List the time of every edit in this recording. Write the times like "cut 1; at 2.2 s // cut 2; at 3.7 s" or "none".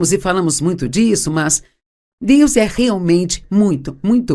cut 1; at 2.7 s